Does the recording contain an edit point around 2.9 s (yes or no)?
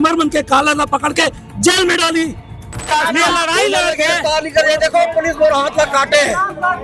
yes